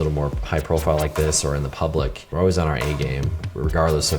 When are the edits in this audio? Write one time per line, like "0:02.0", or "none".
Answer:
0:02.2